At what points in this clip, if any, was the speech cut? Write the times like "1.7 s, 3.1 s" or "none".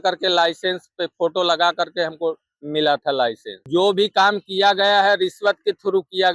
3.5 s